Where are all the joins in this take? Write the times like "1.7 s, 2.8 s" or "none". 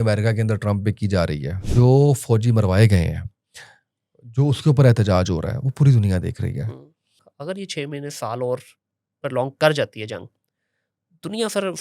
1.6 s, 7.3 s